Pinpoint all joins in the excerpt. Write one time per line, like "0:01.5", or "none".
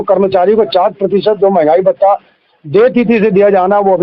none